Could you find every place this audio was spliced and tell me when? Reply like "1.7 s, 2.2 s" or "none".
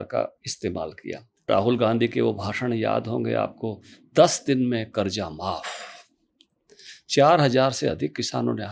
1.5 s